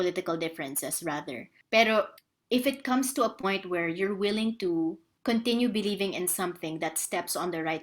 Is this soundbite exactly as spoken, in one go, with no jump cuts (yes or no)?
no